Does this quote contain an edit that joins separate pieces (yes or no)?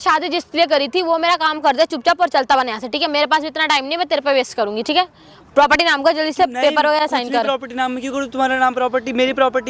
no